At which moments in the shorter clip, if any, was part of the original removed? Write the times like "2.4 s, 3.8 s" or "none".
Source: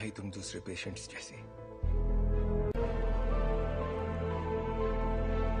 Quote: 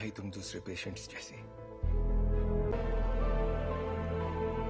2.7 s